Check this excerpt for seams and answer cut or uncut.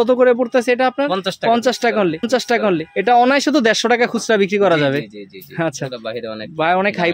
uncut